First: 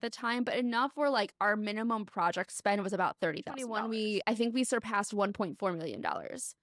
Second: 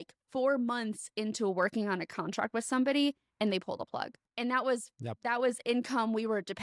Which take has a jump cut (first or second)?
first